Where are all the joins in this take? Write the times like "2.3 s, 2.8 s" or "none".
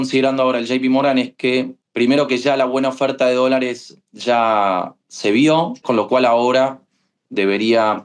1.8 s, 5.8 s